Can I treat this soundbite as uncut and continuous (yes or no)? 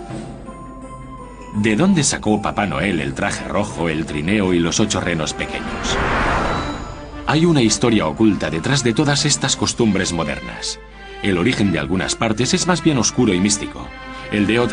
yes